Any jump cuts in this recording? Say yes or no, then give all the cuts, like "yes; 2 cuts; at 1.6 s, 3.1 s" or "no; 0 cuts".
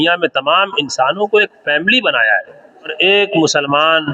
yes; 1 cut; at 2.9 s